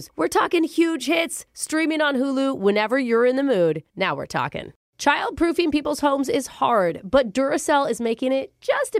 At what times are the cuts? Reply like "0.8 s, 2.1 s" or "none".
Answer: 4.8 s